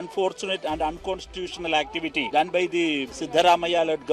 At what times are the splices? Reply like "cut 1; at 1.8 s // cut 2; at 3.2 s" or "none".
cut 1; at 2.3 s // cut 2; at 3.2 s